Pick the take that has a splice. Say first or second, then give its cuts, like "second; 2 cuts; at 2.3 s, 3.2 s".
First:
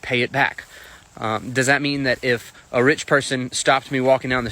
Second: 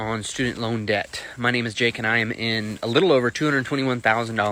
first; 1 cut; at 1.6 s